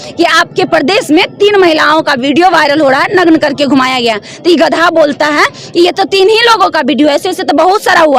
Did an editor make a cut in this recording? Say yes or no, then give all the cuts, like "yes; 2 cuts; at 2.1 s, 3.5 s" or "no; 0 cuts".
no; 0 cuts